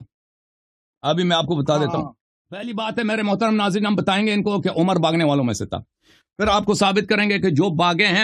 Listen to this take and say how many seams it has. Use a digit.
1